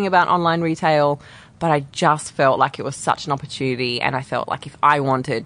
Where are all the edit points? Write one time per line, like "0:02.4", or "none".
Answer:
none